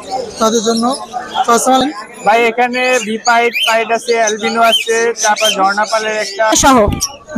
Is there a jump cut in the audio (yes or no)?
yes